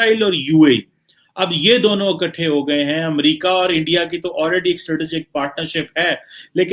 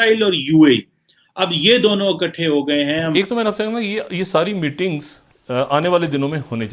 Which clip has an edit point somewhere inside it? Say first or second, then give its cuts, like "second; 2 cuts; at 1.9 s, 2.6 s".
second; 1 cut; at 3.1 s